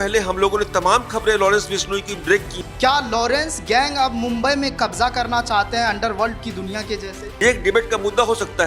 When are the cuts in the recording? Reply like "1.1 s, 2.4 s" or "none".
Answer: 2.5 s, 7.2 s

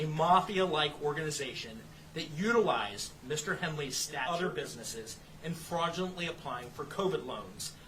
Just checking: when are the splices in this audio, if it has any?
4.2 s

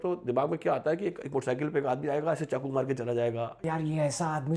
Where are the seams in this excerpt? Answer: 3.6 s

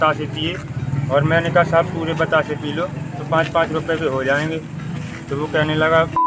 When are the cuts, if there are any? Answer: none

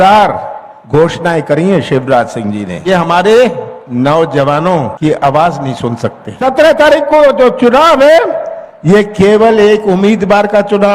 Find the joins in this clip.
2.9 s, 4.9 s, 6.3 s

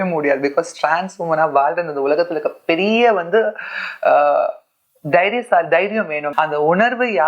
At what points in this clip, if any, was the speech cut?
6.3 s

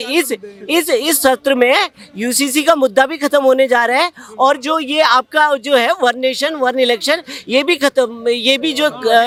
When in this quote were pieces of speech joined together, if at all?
none

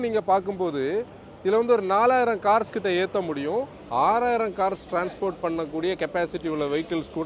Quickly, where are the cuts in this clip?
3.8 s

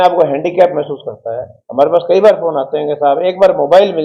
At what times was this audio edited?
none

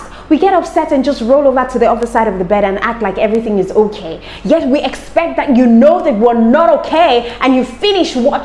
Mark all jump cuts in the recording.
none

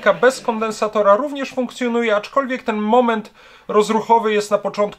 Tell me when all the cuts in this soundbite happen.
none

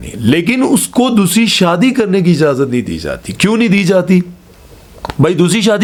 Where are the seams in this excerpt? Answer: none

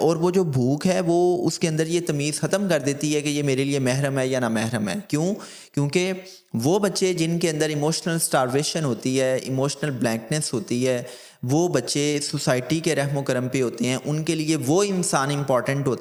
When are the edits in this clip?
none

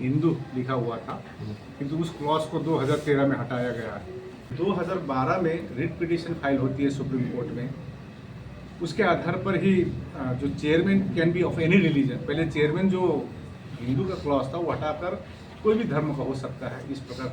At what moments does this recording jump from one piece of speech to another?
4.4 s

